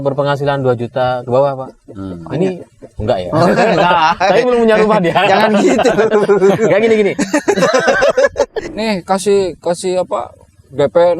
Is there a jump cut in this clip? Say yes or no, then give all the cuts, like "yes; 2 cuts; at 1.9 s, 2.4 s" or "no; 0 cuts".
yes; 1 cut; at 8.6 s